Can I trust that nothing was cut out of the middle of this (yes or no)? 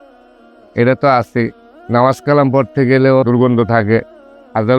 no